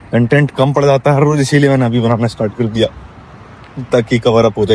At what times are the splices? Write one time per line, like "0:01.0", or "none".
none